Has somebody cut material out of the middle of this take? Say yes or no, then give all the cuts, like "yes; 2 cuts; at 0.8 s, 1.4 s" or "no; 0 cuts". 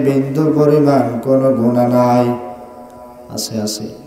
no; 0 cuts